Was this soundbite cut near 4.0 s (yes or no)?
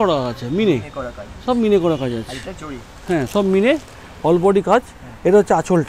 no